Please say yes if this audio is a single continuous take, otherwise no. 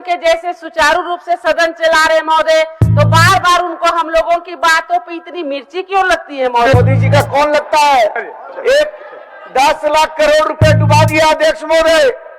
no